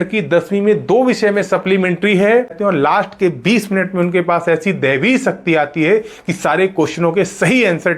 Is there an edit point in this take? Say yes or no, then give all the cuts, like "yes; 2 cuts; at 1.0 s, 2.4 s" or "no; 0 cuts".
yes; 1 cut; at 2.6 s